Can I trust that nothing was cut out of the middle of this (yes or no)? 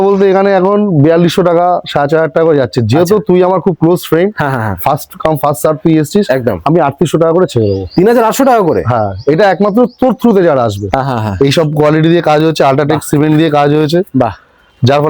no